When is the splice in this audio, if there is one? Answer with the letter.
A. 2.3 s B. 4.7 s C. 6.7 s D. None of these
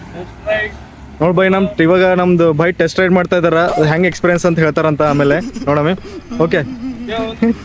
D